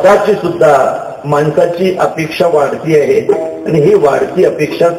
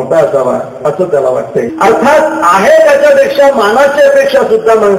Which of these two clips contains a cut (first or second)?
second